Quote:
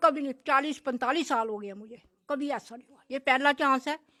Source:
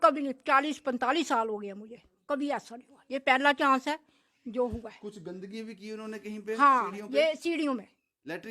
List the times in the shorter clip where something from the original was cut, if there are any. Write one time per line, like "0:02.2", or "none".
none